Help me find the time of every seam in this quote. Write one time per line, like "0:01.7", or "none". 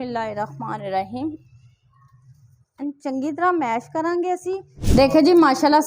0:04.7